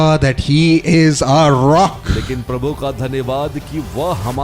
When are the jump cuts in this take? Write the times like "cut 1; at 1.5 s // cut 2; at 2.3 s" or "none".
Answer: cut 1; at 2.1 s